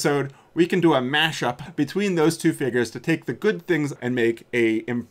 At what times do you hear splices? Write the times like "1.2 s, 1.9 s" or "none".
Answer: 1.6 s, 3.9 s